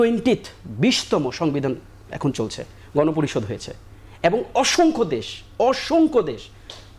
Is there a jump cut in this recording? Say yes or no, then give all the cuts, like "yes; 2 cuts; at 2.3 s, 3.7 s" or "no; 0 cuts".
no; 0 cuts